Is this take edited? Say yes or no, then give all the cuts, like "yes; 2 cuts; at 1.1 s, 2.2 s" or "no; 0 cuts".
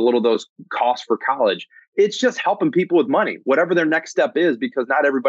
no; 0 cuts